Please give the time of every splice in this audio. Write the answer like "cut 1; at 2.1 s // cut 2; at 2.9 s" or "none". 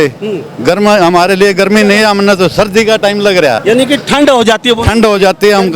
cut 1; at 3.6 s